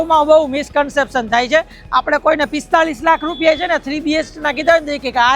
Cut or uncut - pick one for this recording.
uncut